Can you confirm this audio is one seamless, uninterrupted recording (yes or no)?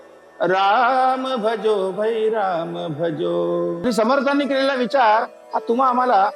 no